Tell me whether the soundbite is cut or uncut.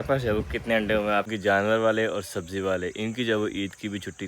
cut